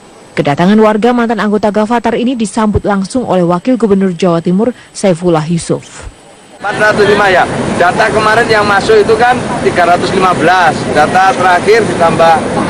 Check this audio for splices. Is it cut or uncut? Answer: cut